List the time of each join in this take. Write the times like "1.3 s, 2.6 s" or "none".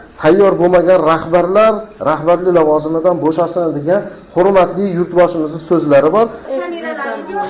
6.4 s